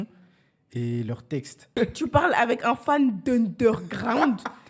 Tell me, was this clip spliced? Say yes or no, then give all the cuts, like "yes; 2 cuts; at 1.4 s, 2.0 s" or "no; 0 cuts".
yes; 1 cut; at 1.7 s